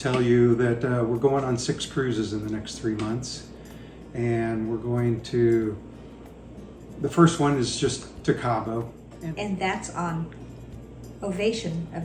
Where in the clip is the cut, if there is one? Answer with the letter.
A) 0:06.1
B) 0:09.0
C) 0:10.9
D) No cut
B